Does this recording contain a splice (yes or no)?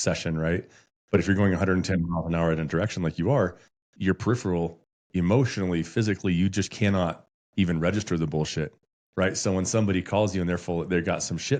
no